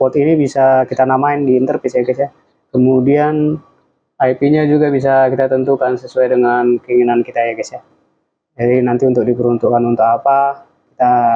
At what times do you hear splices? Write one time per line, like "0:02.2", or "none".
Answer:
none